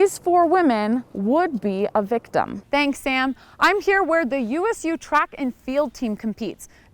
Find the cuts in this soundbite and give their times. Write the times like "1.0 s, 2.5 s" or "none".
2.6 s